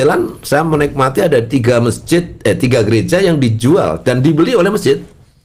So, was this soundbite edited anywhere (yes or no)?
no